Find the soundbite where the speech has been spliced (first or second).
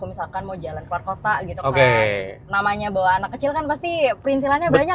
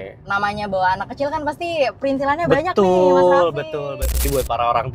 second